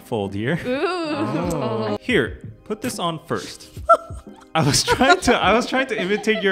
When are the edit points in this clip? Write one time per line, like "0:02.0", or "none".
0:02.0